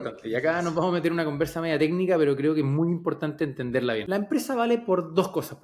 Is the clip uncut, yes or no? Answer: no